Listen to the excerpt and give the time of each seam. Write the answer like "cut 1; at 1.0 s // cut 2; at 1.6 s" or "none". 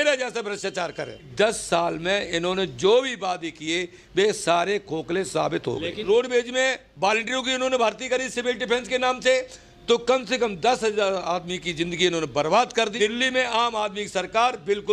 cut 1; at 1.3 s // cut 2; at 6.0 s // cut 3; at 12.9 s